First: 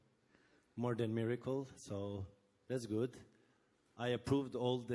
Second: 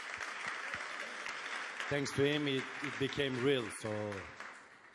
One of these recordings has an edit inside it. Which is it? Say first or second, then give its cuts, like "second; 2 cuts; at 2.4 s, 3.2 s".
second; 1 cut; at 2.1 s